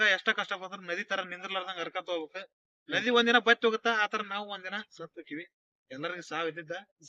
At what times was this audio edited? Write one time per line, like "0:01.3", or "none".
none